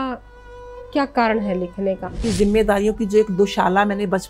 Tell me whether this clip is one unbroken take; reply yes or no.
no